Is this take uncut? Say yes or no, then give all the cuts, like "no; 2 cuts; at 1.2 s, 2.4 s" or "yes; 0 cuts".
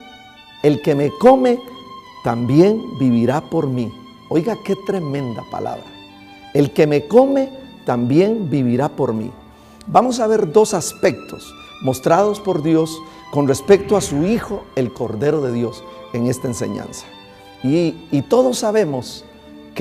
no; 1 cut; at 17.0 s